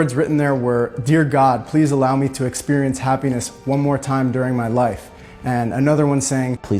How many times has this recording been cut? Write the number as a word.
zero